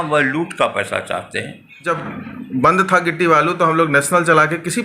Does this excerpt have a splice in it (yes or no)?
yes